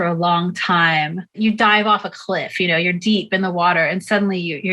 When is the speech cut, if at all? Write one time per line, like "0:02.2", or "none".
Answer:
0:01.3